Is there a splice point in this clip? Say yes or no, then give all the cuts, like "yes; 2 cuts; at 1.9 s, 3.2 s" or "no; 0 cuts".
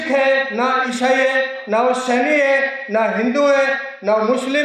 no; 0 cuts